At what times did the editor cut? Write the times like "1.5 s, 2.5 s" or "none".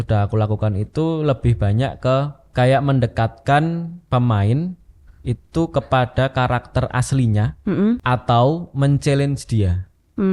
2.4 s, 8.0 s

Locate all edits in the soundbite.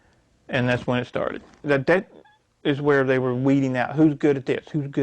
1.6 s

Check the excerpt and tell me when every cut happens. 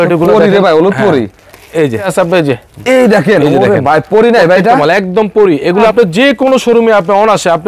2.1 s, 5.9 s

